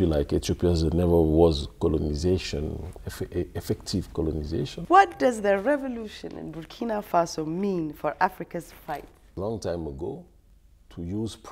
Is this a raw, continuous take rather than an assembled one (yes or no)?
no